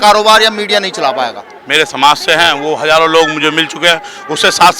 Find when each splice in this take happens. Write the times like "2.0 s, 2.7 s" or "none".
1.5 s